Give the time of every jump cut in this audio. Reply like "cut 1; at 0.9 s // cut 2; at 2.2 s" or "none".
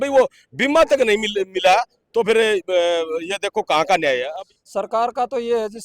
cut 1; at 4.3 s